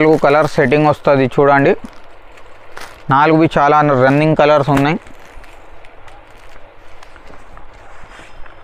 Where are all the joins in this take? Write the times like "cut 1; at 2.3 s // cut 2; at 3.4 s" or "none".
none